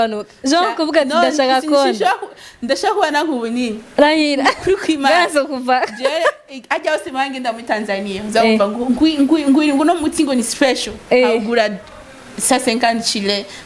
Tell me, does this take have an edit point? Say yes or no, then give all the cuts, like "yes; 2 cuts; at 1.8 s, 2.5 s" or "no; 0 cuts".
no; 0 cuts